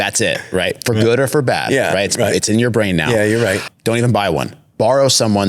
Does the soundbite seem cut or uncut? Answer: cut